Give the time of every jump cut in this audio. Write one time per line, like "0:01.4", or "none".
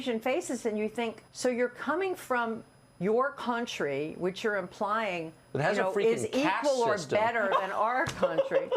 0:01.2